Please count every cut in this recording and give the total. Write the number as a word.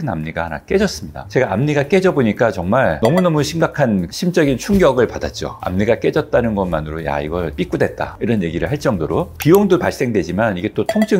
zero